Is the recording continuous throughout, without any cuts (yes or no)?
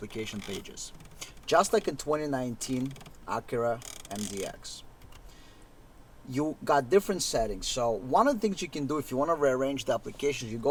yes